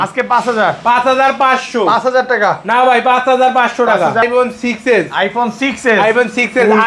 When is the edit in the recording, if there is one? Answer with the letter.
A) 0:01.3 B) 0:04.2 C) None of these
B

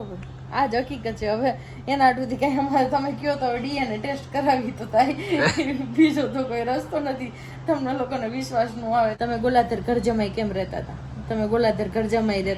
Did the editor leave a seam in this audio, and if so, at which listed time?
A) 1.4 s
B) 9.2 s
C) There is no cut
B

